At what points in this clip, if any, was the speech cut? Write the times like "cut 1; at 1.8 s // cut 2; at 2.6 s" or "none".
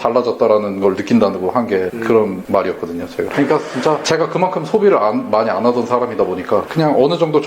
cut 1; at 3.3 s

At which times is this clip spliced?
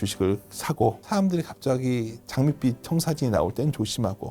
cut 1; at 1.0 s

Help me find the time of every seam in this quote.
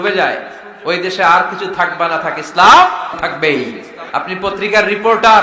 cut 1; at 3.2 s // cut 2; at 4.0 s

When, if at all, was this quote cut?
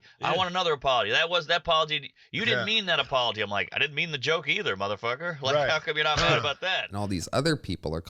cut 1; at 6.8 s

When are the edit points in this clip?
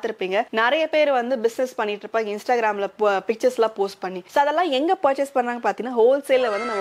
none

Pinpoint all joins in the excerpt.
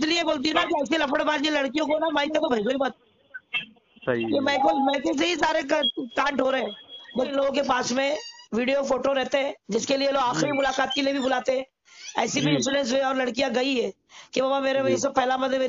cut 1; at 7.3 s

